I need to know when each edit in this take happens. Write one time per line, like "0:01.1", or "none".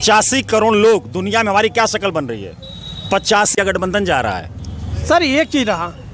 0:03.5